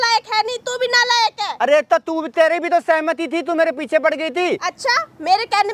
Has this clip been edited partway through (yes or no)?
no